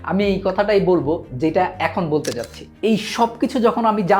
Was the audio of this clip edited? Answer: yes; 1 cut; at 2.7 s

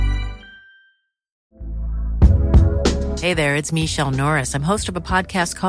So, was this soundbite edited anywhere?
yes; 1 cut; at 1.3 s

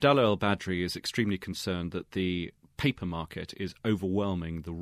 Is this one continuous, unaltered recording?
yes; 0 cuts

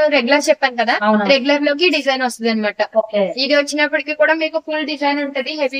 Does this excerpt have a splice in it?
no; 0 cuts

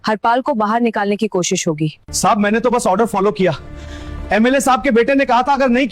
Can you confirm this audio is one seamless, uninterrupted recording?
no; 1 cut; at 2.1 s

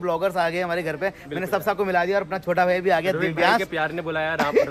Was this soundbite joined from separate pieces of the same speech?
no; 0 cuts

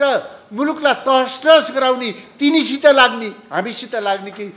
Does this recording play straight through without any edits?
yes; 0 cuts

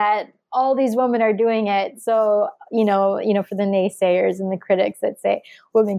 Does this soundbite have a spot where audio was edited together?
no; 0 cuts

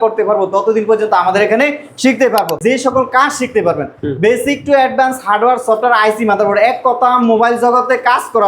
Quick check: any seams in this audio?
yes; 1 cut; at 2.6 s

